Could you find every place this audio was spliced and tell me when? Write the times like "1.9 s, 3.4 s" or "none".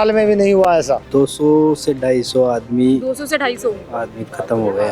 1.0 s